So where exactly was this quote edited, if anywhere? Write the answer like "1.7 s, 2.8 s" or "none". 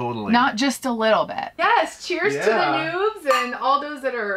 1.5 s